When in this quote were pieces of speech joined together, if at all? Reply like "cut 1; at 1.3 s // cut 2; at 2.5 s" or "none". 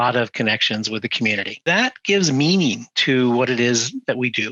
cut 1; at 1.5 s